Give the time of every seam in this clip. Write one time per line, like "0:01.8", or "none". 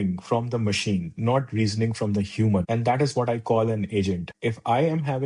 0:02.7
0:04.3